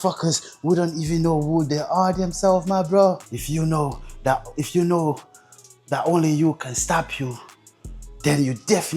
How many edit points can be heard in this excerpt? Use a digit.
1